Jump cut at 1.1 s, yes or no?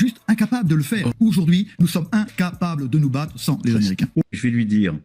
yes